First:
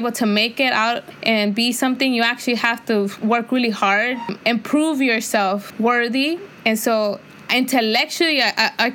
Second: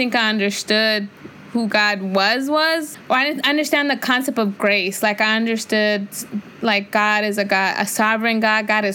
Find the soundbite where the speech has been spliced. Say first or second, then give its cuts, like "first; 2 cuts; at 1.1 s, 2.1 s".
first; 4 cuts; at 1.1 s, 4.3 s, 5.7 s, 6.5 s